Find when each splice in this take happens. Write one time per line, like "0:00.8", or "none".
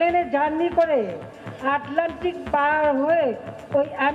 none